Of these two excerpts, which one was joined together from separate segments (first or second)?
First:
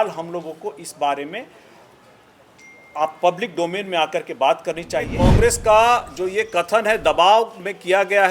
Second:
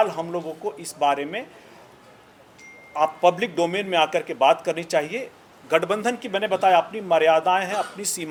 first